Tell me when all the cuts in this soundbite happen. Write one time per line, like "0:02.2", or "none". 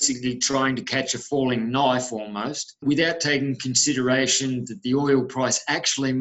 0:02.6